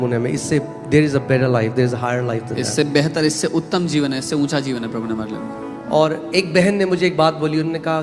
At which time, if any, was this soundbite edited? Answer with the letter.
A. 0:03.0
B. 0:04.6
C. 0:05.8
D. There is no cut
C